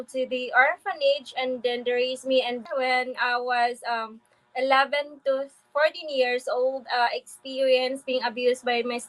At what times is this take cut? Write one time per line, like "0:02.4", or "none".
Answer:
0:02.7